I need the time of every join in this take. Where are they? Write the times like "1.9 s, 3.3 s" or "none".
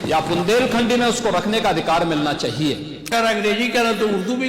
3.1 s